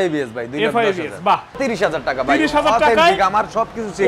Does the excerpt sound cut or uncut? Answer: cut